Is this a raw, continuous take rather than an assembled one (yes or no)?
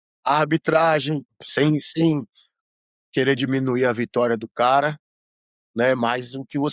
no